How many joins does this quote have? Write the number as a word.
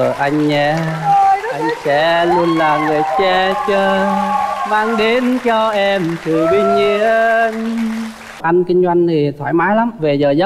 one